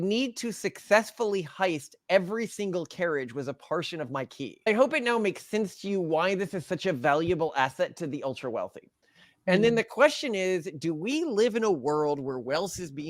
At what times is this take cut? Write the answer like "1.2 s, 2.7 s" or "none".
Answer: 4.7 s